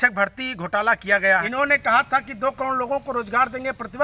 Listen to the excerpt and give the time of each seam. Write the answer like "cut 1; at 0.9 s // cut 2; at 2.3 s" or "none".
cut 1; at 1.5 s